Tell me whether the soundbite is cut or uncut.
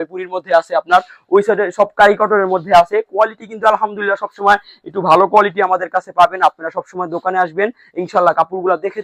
uncut